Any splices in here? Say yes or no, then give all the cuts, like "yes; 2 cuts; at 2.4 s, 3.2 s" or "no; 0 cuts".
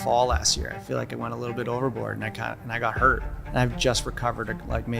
yes; 1 cut; at 3.3 s